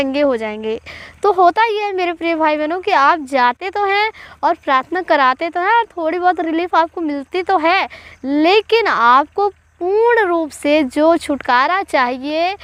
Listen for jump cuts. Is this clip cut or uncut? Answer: uncut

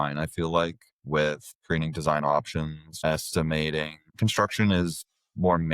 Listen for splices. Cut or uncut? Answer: cut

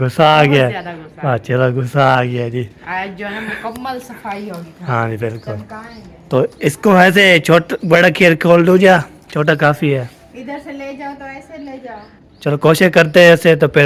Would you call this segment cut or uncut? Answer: uncut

